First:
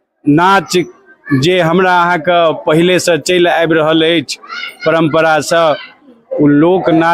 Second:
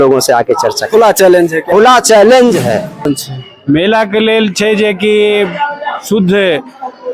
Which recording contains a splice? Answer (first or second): second